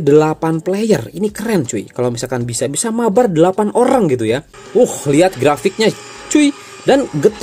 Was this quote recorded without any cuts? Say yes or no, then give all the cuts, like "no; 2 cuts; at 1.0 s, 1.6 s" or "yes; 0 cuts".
no; 1 cut; at 4.5 s